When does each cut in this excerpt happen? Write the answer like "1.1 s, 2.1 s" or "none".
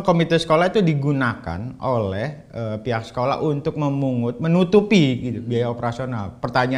none